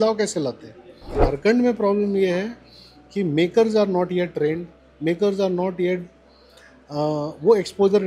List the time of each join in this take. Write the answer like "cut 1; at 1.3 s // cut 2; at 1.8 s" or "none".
cut 1; at 1.3 s